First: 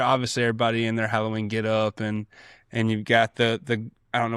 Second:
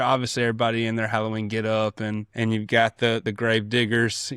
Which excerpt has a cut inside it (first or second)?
second